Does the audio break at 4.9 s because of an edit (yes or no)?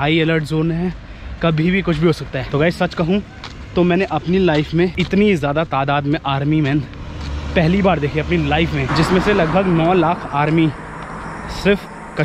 yes